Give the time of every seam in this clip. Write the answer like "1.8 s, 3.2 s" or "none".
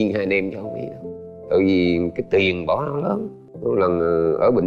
3.4 s